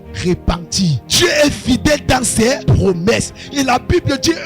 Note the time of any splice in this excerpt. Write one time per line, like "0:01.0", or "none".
0:01.0
0:02.6